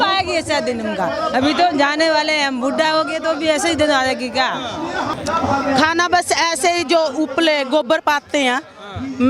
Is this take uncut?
no; 1 cut; at 5.2 s

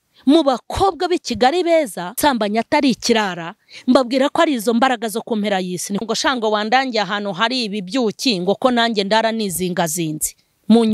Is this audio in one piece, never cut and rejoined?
no; 2 cuts; at 2.2 s, 6.0 s

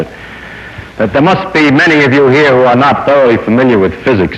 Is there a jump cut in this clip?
no; 0 cuts

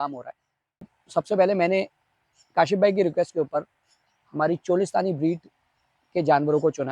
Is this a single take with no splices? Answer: no; 1 cut; at 0.9 s

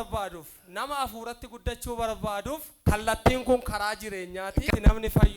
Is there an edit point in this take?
yes; 2 cuts; at 2.7 s, 4.6 s

